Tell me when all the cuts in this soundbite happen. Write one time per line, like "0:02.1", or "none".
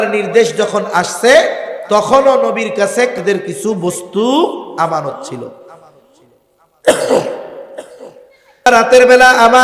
0:03.1
0:08.7